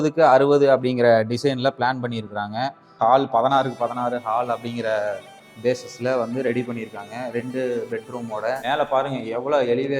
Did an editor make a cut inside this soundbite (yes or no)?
yes